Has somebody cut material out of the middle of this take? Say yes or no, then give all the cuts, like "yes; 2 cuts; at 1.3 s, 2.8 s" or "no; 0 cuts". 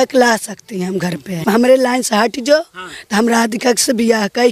yes; 1 cut; at 1.4 s